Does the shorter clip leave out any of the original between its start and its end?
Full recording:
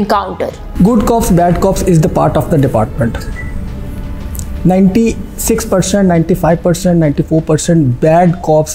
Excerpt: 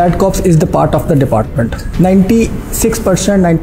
yes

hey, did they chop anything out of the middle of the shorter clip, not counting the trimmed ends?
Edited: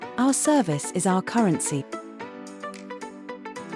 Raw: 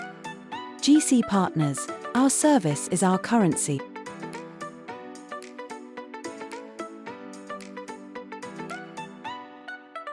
yes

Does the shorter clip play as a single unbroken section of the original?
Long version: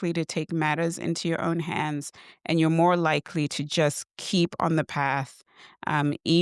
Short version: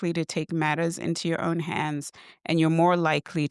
yes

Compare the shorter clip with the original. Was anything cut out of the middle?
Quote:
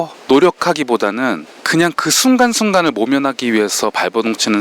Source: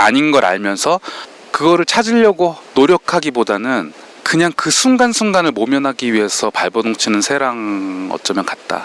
yes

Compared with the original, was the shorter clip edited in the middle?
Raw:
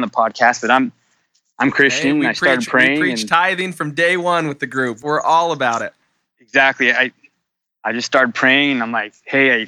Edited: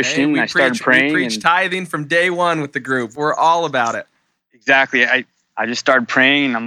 yes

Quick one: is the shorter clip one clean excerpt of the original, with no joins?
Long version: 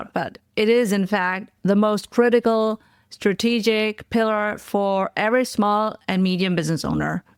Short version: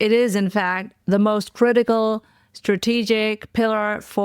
yes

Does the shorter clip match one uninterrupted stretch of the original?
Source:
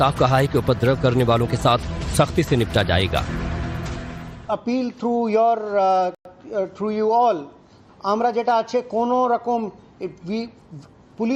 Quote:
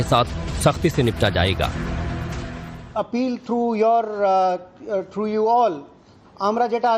no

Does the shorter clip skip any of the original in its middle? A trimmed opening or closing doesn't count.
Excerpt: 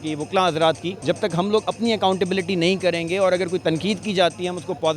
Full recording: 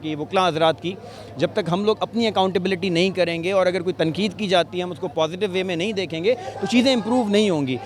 yes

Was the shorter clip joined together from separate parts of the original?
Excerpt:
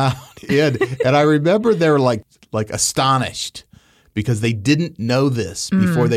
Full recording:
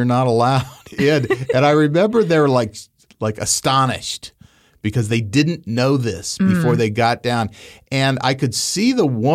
yes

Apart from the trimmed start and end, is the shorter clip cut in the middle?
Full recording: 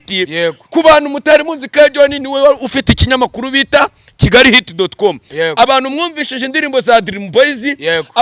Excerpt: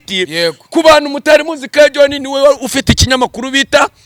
no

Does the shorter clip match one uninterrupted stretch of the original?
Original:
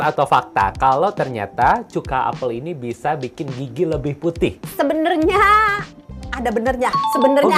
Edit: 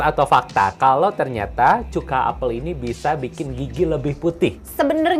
yes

